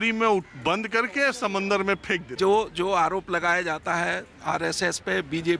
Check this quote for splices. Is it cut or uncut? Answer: cut